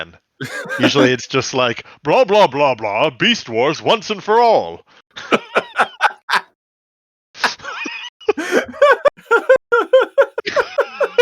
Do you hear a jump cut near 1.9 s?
no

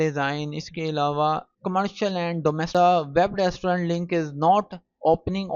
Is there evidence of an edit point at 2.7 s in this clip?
yes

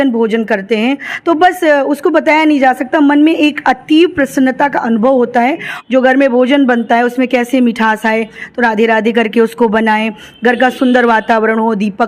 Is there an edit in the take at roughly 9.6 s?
no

